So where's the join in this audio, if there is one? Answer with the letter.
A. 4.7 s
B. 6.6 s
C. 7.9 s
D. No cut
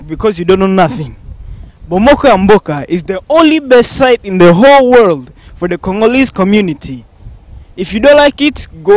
D